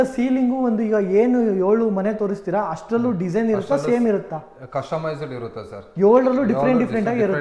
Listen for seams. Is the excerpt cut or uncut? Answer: uncut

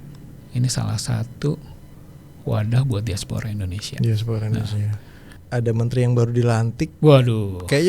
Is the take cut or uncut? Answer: cut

